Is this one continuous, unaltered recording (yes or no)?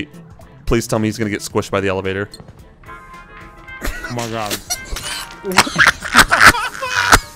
yes